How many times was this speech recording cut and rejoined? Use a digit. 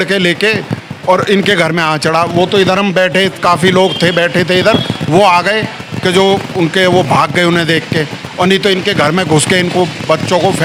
0